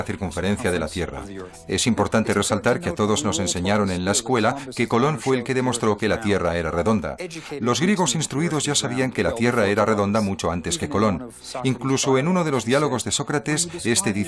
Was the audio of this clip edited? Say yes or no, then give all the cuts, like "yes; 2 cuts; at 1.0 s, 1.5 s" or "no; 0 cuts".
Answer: yes; 1 cut; at 9.4 s